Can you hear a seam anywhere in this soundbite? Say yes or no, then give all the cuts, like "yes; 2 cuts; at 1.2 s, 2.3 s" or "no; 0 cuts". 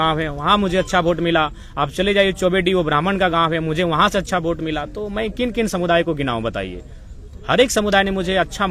no; 0 cuts